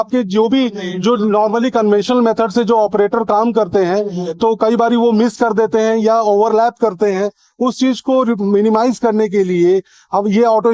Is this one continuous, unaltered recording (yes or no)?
yes